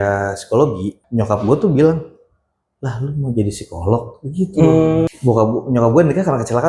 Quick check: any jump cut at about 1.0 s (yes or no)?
yes